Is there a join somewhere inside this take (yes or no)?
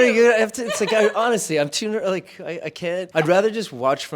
yes